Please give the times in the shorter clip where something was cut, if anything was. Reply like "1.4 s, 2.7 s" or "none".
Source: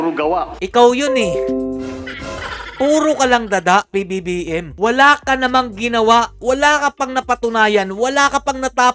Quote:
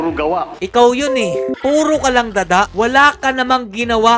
1.5 s, 2.7 s